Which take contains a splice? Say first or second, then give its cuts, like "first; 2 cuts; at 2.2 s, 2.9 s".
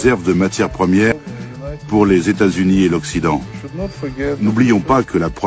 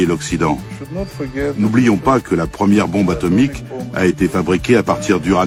first; 1 cut; at 1.1 s